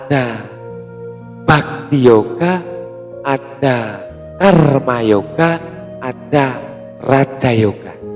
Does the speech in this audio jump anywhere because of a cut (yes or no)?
no